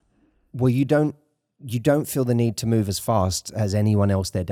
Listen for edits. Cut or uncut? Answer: uncut